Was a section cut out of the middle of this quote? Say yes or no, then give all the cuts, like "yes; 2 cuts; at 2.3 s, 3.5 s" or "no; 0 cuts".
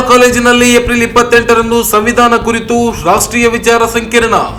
no; 0 cuts